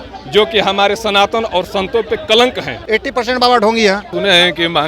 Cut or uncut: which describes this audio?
cut